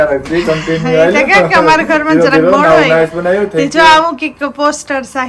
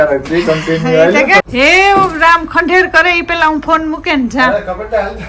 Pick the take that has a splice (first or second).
second